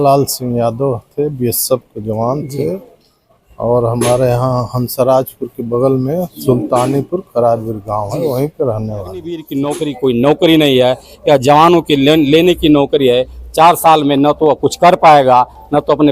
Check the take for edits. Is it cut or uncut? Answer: cut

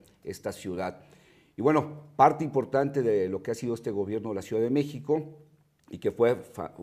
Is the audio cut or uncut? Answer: cut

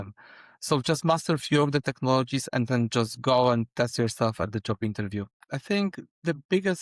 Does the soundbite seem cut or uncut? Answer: cut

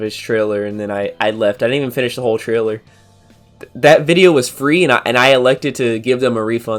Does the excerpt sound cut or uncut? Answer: uncut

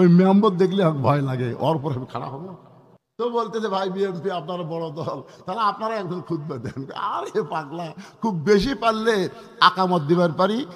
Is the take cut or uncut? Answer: cut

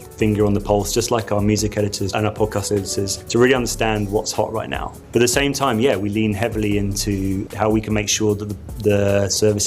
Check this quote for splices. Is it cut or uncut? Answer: cut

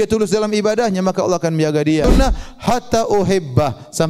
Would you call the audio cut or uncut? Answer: cut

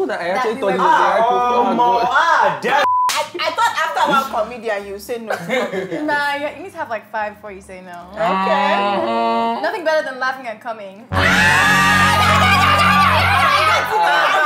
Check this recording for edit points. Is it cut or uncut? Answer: cut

